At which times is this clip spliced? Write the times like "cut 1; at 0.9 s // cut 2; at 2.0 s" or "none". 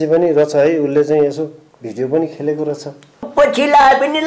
cut 1; at 3.3 s